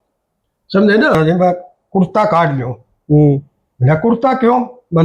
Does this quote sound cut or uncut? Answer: cut